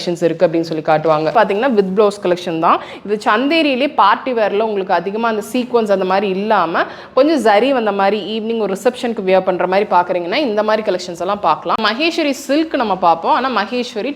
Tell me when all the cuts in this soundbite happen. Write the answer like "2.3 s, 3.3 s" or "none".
1.3 s, 11.8 s